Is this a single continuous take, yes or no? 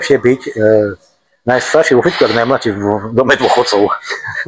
yes